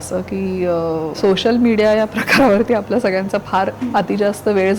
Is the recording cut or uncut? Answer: cut